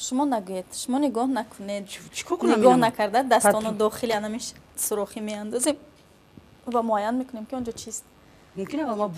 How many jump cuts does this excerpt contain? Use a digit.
0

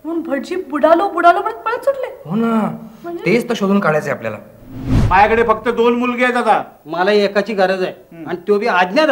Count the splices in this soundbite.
1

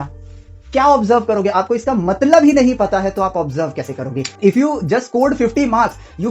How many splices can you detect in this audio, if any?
1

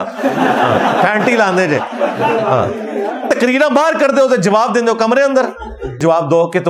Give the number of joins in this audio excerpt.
2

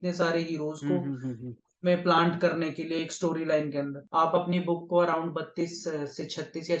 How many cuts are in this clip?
1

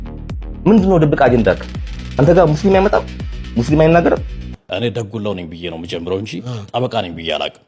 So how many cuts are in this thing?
1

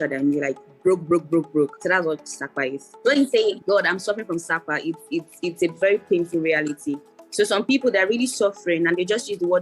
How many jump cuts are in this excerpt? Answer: 2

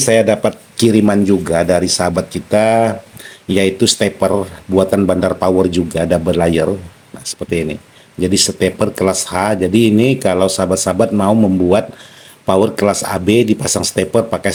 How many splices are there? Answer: 0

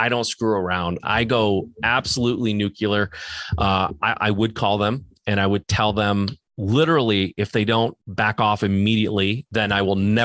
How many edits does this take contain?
3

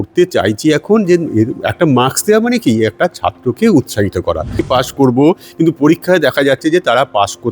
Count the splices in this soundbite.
1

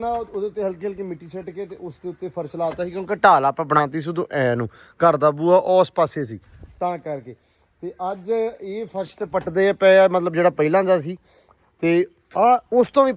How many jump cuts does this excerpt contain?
0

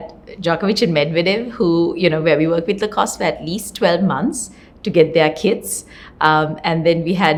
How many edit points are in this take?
0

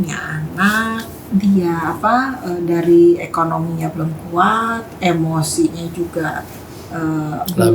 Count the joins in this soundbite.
1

